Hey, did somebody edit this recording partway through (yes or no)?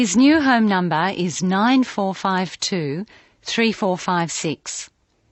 no